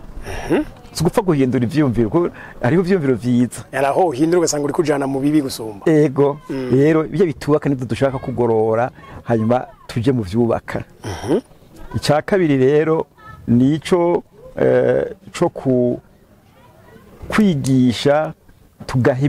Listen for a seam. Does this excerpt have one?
no; 0 cuts

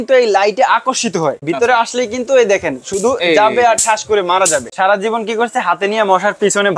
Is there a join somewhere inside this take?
yes; 2 cuts; at 1.4 s, 4.7 s

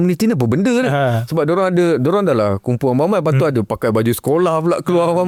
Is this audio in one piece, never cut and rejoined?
yes; 0 cuts

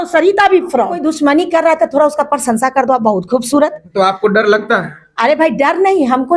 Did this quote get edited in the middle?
yes; 1 cut; at 0.9 s

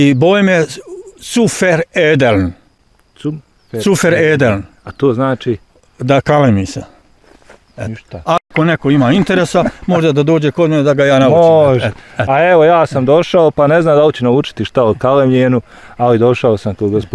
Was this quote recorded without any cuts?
yes; 0 cuts

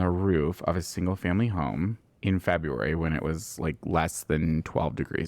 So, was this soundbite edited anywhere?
no; 0 cuts

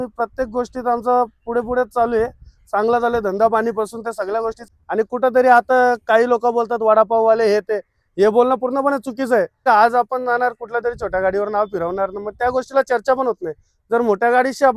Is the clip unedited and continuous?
no; 2 cuts; at 4.6 s, 9.6 s

